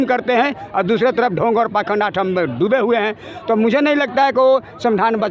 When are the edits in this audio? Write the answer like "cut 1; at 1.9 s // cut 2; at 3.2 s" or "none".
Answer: none